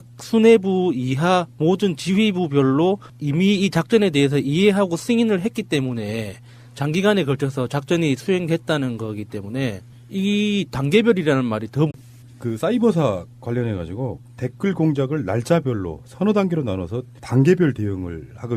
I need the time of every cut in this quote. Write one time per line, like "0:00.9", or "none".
none